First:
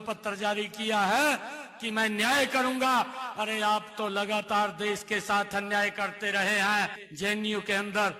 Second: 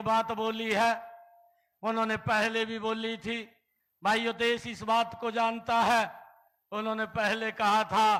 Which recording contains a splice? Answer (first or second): first